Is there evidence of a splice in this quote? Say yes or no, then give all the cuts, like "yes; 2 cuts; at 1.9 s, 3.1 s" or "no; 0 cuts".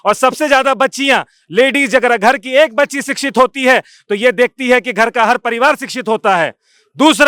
no; 0 cuts